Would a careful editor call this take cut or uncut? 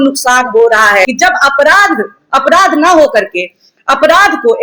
cut